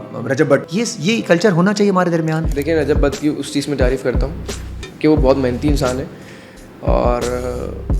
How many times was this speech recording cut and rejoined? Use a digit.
1